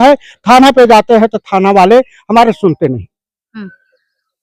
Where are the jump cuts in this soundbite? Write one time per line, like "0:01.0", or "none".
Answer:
none